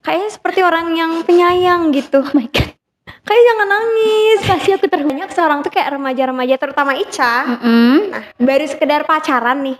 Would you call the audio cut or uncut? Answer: cut